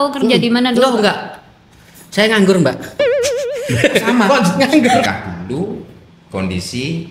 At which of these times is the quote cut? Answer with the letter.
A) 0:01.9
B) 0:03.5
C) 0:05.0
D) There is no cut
C